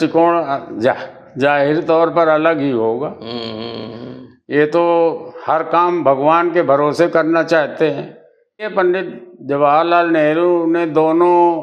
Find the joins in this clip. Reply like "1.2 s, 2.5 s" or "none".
8.7 s